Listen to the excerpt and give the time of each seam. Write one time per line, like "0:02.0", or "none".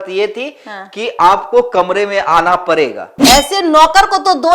0:03.2